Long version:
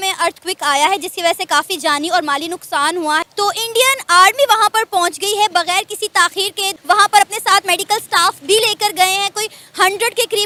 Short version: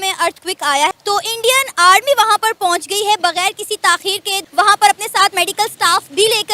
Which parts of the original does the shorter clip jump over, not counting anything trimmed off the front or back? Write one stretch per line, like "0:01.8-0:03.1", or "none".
0:00.9-0:03.2